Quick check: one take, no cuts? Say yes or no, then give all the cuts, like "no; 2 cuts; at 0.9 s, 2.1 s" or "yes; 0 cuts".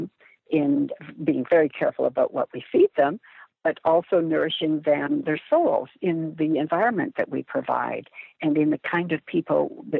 yes; 0 cuts